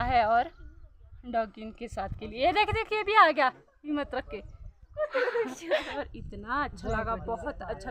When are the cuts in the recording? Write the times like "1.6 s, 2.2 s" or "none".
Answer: 5.9 s